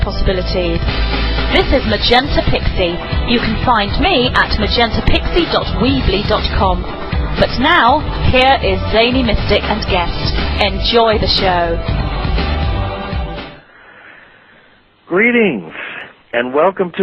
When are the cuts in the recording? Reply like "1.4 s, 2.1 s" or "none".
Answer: 13.5 s